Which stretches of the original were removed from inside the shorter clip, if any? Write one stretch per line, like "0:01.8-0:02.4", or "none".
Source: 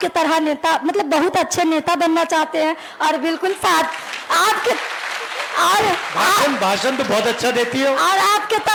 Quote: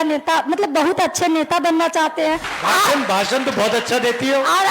0:02.9-0:06.0